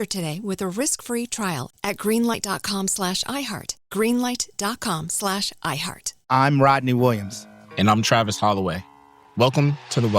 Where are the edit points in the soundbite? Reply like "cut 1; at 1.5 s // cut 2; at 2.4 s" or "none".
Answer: cut 1; at 6.2 s

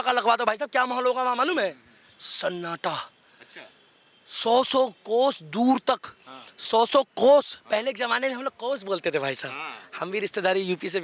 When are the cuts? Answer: none

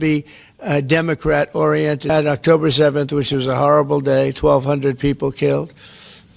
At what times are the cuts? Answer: cut 1; at 2.1 s

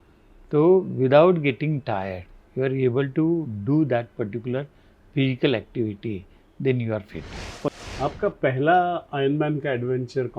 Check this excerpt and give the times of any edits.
cut 1; at 7.7 s

